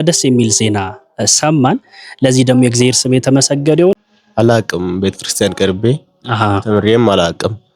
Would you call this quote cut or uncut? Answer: cut